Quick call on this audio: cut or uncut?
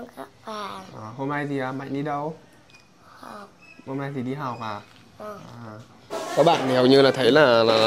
cut